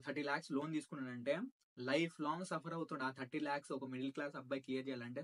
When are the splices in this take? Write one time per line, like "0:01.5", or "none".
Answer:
none